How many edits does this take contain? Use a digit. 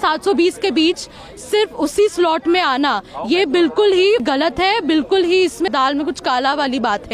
2